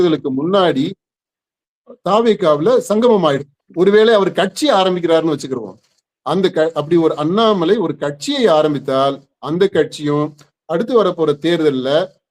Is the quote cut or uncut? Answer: cut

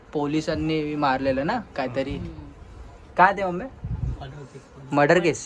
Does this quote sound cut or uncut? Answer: uncut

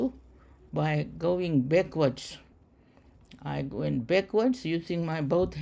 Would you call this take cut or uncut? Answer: uncut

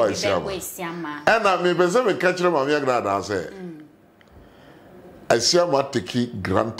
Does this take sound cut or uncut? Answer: uncut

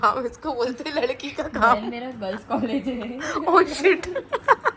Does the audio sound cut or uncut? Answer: uncut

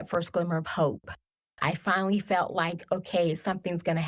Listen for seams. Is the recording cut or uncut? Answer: uncut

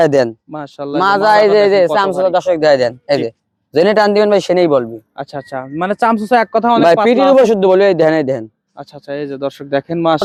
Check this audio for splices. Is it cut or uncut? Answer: uncut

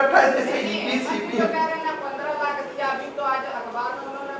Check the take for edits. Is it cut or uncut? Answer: uncut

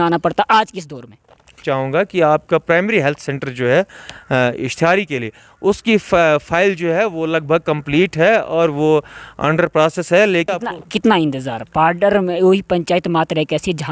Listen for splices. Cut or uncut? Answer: cut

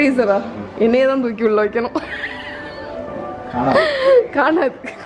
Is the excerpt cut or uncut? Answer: uncut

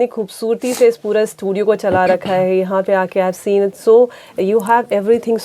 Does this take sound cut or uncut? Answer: uncut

